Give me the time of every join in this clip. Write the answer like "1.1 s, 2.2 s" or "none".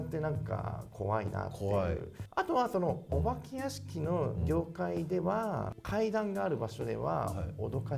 none